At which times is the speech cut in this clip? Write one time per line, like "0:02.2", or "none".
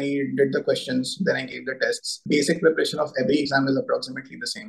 0:02.2